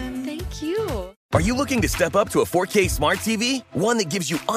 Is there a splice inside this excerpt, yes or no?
yes